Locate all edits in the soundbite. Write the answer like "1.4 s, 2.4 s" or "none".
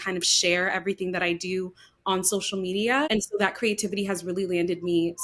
3.1 s